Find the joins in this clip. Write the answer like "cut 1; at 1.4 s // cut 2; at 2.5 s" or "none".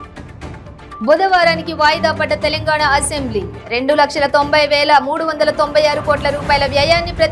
cut 1; at 1.0 s